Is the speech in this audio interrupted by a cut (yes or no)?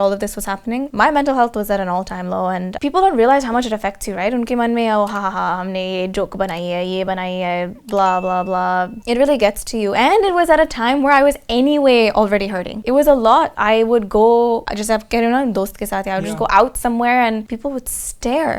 no